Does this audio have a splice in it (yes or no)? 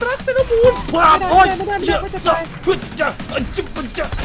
no